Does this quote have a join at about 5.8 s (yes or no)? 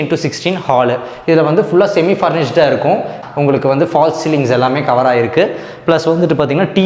no